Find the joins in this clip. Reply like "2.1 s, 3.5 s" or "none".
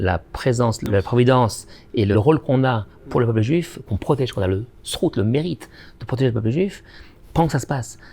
0.9 s, 2.1 s, 3.8 s